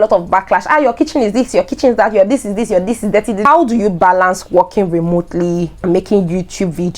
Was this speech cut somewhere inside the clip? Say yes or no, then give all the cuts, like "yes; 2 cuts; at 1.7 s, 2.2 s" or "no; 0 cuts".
yes; 2 cuts; at 3.4 s, 5.8 s